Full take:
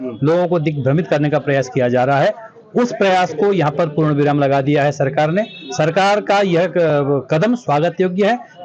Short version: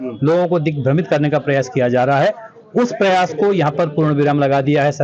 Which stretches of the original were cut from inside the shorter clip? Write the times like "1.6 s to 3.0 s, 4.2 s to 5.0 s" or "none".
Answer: none